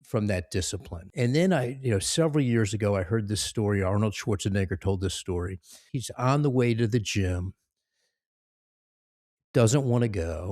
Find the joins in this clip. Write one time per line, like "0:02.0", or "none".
0:01.1